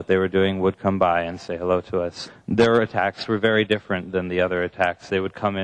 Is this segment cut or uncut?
cut